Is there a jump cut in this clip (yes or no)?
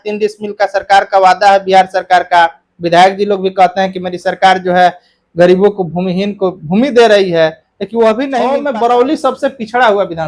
yes